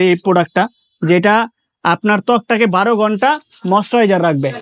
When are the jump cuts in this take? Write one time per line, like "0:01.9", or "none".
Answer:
none